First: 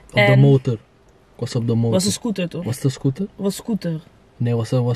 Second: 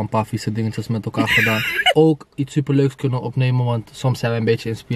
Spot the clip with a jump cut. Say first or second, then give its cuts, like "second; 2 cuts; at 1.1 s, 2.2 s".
second; 1 cut; at 1.9 s